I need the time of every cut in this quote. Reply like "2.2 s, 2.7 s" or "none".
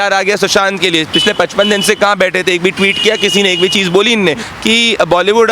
4.5 s